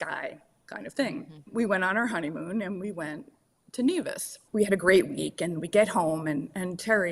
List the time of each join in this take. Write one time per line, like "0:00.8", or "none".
0:01.5
0:04.3